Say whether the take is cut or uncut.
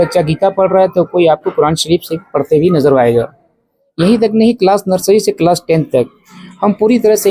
uncut